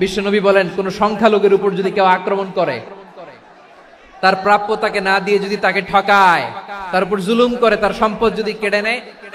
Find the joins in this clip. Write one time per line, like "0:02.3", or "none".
none